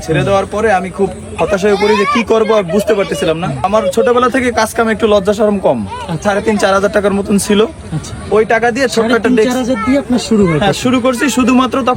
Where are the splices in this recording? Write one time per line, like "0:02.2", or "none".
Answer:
0:03.7
0:06.2